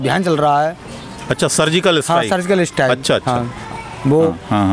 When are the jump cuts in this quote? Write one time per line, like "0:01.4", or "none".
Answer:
none